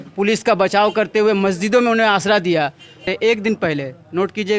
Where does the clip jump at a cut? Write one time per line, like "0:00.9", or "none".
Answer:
0:03.1